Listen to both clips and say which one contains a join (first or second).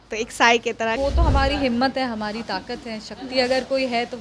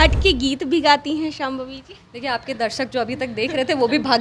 first